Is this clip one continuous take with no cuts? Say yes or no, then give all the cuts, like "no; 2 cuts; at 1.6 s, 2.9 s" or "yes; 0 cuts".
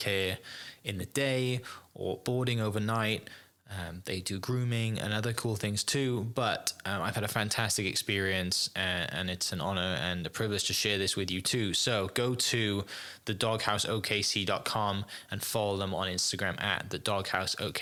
yes; 0 cuts